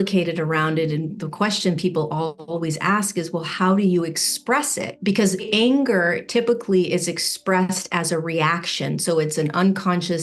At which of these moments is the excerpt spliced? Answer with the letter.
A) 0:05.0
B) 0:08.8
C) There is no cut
A